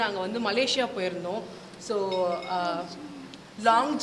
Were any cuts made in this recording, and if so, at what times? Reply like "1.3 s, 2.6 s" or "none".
none